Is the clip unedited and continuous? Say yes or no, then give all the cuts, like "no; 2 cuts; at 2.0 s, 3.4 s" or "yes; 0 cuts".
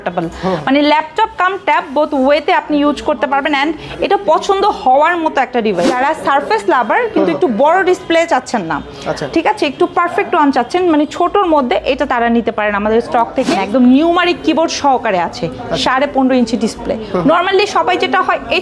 no; 2 cuts; at 5.9 s, 13.5 s